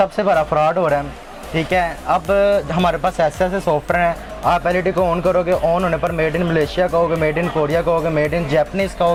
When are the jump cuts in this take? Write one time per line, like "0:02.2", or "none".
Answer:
none